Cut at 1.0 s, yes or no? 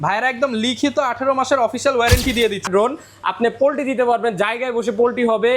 no